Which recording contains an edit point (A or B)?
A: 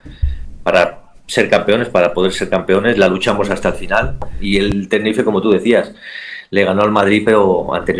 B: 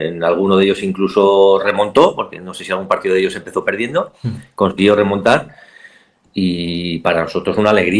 A